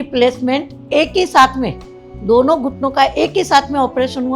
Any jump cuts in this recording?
no; 0 cuts

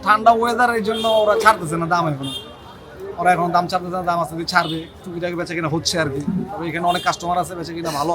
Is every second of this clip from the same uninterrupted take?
yes; 0 cuts

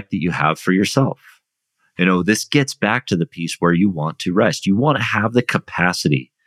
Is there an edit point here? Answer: no; 0 cuts

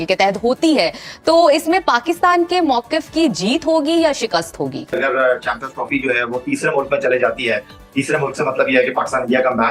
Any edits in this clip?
no; 0 cuts

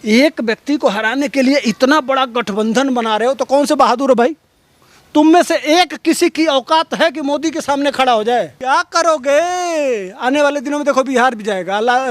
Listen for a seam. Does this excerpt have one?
yes; 1 cut; at 8.5 s

